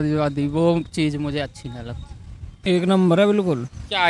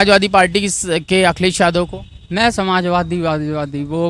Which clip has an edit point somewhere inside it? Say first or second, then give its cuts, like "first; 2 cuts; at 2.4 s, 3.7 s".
first; 1 cut; at 2.5 s